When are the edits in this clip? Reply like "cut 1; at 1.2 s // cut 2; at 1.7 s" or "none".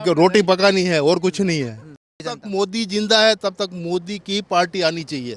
cut 1; at 2.2 s